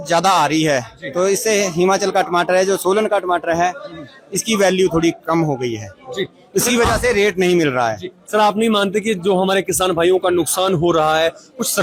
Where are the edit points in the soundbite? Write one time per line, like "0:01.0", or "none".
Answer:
none